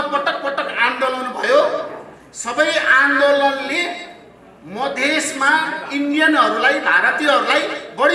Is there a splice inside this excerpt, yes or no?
no